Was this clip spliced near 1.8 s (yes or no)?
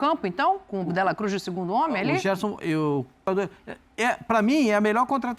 no